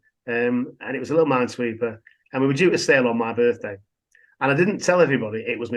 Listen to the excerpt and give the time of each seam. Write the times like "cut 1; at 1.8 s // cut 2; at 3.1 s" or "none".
none